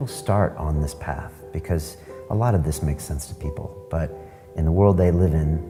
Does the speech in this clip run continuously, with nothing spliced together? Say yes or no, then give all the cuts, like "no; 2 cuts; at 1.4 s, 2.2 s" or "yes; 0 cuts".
yes; 0 cuts